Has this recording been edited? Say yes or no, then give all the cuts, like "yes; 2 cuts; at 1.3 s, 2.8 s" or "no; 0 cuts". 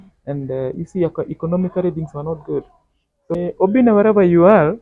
yes; 1 cut; at 3.4 s